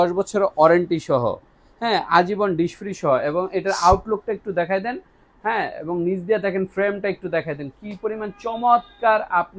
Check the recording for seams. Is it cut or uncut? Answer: uncut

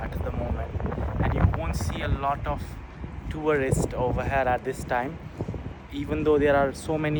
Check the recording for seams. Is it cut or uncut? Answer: uncut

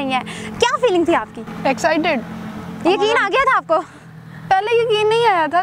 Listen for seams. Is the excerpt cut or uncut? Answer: uncut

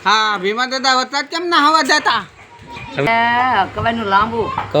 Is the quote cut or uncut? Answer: cut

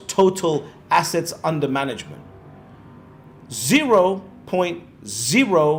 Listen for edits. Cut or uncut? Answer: uncut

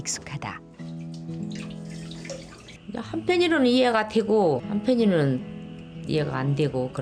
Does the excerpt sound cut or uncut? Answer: uncut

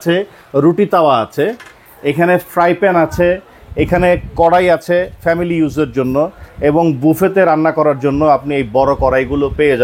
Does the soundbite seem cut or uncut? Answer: uncut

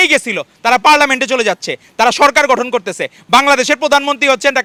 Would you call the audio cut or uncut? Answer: uncut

